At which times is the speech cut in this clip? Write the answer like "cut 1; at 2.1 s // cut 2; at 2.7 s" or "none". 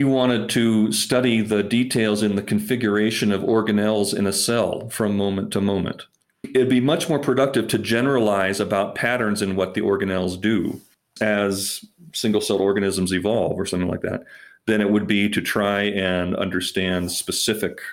none